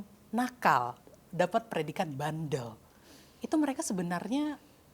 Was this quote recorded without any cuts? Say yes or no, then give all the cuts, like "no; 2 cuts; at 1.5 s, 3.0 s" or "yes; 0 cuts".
yes; 0 cuts